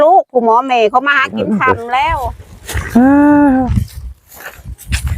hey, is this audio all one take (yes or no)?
no